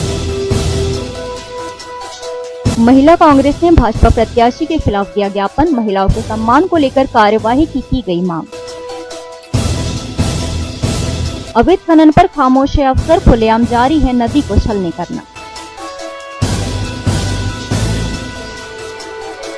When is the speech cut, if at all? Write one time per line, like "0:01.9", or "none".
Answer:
0:01.4